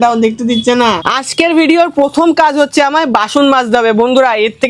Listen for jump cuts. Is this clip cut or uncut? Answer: cut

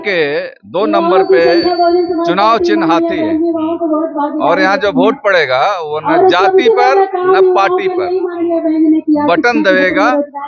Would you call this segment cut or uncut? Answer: uncut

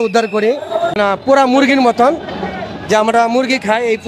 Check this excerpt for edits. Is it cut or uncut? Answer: cut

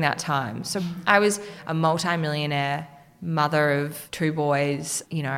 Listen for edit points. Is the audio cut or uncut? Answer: cut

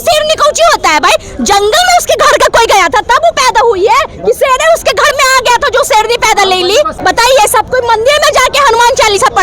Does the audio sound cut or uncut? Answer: cut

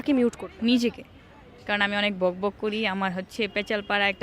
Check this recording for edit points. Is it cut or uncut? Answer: cut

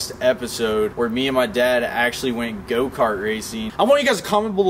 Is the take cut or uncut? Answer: cut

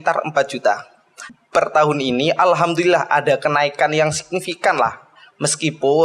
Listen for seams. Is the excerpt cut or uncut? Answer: cut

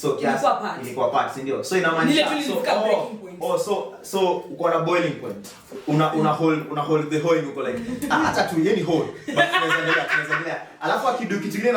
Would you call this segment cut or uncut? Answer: uncut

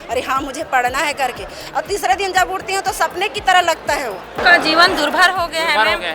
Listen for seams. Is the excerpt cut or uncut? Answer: cut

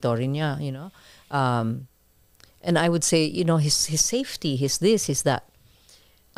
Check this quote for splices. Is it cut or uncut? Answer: uncut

